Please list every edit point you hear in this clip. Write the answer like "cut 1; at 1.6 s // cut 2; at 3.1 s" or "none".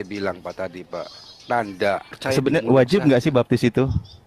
cut 1; at 2.1 s